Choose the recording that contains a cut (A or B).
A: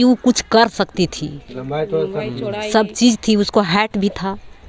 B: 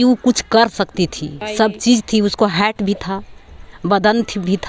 B